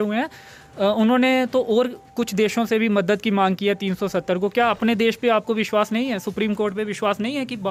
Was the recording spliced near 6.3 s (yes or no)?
no